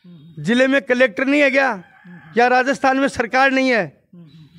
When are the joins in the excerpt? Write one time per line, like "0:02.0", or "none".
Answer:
none